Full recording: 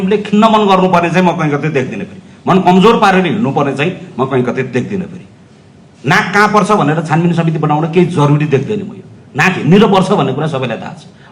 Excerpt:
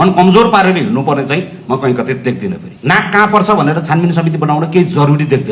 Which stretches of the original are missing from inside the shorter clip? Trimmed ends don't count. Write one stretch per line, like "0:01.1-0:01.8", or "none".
0:05.2-0:05.9

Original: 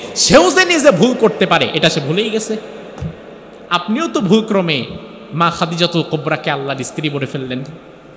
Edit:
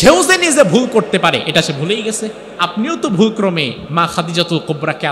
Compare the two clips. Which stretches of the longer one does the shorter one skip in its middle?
0:02.7-0:03.6
0:04.9-0:05.2

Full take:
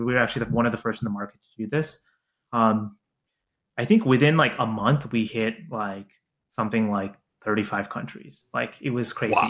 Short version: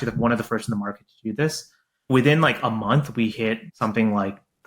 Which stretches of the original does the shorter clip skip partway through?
0:02.4-0:04.0
0:05.6-0:06.4

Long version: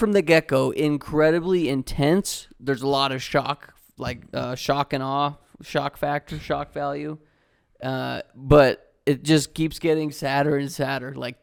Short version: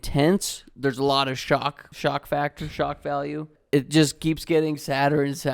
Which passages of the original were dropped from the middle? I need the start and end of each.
0:03.7-0:05.6
0:07.3-0:08.9

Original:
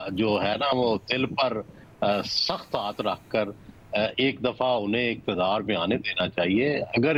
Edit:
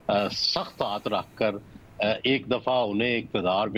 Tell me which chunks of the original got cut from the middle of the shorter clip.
none

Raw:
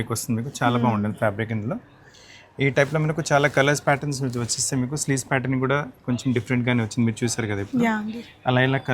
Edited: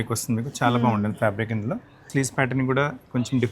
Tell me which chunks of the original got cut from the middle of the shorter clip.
0:02.0-0:05.0

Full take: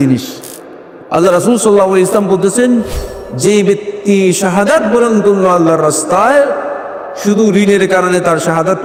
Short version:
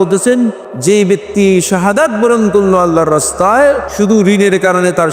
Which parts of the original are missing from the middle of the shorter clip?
0:03.4-0:03.8
0:06.6-0:07.2

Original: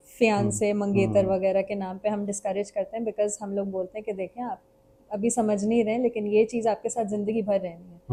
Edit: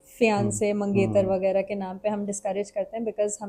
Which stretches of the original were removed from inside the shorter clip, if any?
none

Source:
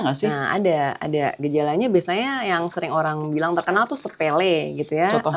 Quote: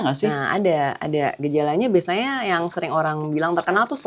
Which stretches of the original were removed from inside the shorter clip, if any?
none

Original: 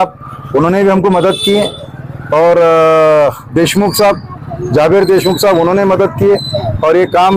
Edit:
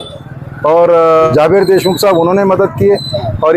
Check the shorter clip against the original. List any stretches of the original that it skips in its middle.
0:03.0-0:04.7

